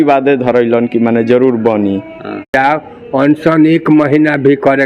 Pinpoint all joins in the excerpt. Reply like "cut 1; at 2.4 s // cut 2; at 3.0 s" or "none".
cut 1; at 2.5 s